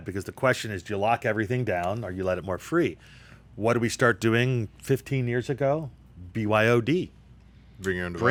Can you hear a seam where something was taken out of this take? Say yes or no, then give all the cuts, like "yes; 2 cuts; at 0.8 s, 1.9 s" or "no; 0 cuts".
no; 0 cuts